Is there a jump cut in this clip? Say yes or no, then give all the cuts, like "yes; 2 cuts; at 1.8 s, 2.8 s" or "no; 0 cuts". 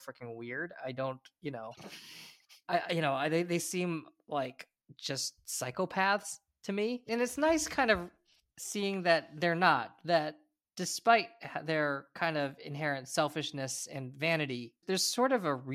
no; 0 cuts